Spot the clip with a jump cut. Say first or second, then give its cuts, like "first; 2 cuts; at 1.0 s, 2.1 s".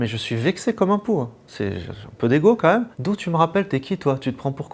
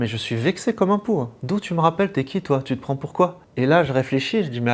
second; 2 cuts; at 1.4 s, 3.4 s